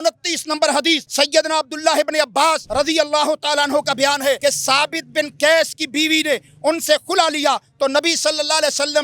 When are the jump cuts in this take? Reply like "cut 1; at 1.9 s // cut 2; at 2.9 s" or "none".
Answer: cut 1; at 1.1 s // cut 2; at 2.6 s // cut 3; at 4.4 s